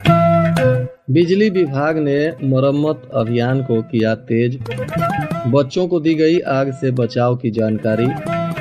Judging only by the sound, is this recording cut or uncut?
cut